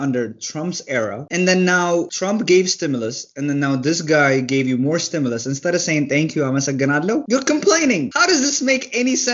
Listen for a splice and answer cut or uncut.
cut